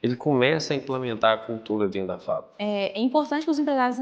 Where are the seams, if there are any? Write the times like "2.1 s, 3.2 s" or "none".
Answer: 2.5 s